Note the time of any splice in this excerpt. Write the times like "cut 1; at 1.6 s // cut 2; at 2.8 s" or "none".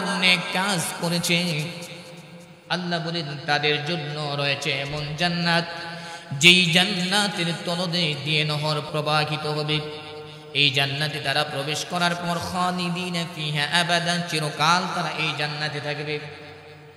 cut 1; at 8.9 s